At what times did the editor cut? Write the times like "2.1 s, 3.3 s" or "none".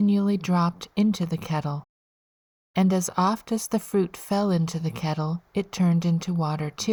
none

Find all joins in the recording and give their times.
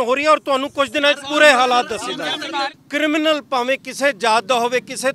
2.8 s

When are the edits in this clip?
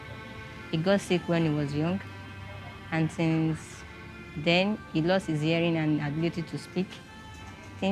none

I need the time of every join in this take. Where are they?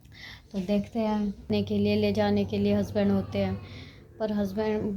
1.5 s

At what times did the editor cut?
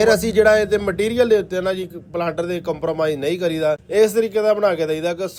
none

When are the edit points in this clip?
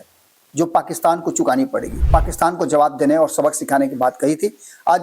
2.0 s

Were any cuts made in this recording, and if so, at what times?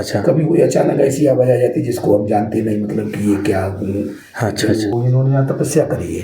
4.9 s

